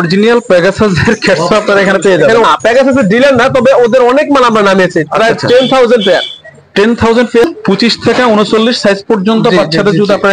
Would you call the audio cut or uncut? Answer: cut